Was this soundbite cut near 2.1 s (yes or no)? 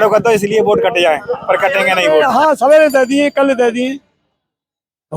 yes